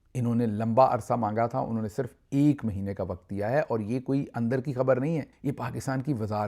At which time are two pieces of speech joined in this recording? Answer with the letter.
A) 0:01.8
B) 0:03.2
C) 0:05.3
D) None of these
C